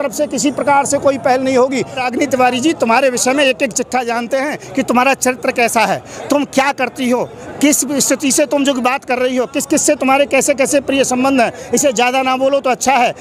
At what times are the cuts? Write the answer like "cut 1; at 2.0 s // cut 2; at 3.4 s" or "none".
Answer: cut 1; at 2.0 s